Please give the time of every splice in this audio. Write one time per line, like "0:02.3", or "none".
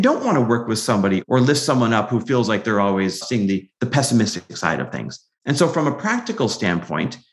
0:01.2
0:03.2